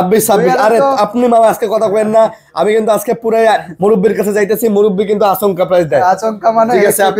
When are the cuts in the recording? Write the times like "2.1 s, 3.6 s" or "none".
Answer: none